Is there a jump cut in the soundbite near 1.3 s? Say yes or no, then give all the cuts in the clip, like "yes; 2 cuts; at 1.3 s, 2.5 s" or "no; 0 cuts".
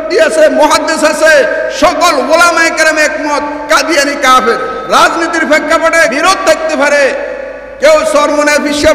no; 2 cuts; at 4.8 s, 6.2 s